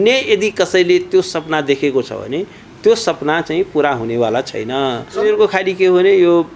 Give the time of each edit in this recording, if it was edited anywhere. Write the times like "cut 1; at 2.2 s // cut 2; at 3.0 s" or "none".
cut 1; at 5.2 s